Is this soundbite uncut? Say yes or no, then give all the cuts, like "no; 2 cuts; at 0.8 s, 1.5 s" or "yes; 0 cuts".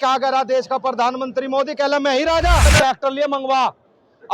no; 1 cut; at 2.7 s